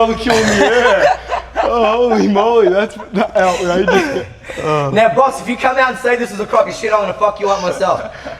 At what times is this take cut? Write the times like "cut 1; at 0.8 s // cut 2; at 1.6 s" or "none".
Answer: none